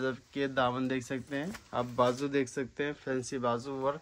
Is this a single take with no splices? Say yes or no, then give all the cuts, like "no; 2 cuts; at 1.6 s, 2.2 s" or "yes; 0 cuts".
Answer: yes; 0 cuts